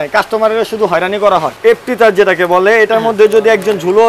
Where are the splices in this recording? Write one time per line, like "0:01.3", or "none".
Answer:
0:01.5